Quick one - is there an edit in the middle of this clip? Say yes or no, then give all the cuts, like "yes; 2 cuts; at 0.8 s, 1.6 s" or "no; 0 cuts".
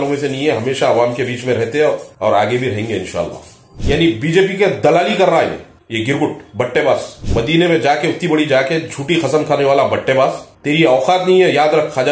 yes; 2 cuts; at 3.7 s, 7.2 s